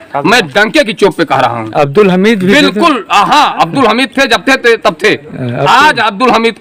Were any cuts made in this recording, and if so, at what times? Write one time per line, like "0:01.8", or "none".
none